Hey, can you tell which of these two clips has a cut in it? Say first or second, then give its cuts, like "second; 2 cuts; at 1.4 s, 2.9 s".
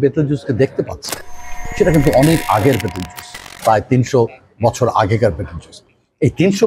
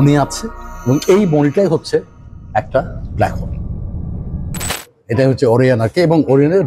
second; 1 cut; at 4.8 s